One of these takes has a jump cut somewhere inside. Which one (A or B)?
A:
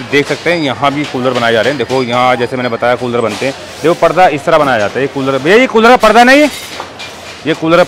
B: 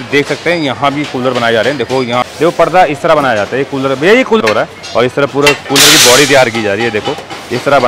B